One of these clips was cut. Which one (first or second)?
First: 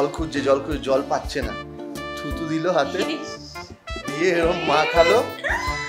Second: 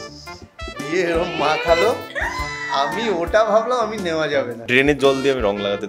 second